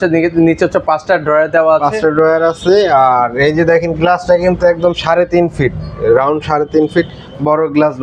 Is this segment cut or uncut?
uncut